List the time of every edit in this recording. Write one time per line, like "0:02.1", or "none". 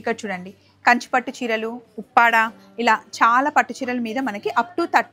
none